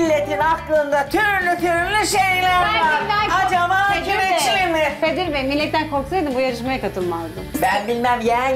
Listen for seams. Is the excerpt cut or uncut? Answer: cut